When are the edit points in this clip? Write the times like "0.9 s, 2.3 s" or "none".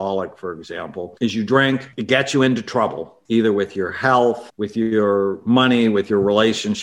1.1 s, 1.9 s, 3.1 s, 4.5 s